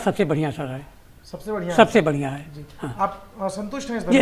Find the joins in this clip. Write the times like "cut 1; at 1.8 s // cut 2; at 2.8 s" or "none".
none